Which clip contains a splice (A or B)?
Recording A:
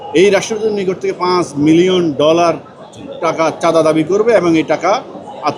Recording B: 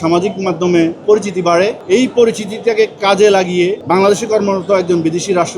B